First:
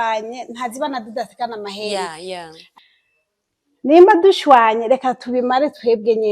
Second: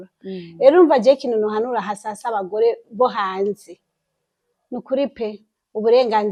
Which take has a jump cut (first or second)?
first